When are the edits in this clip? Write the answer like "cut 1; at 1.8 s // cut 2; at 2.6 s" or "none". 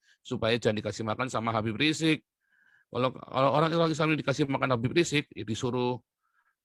none